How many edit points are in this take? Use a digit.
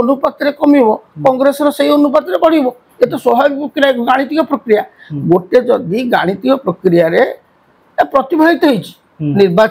0